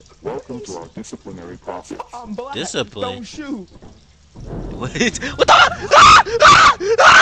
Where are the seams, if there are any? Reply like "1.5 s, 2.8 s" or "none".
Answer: none